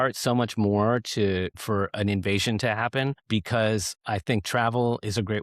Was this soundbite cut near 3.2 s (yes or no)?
yes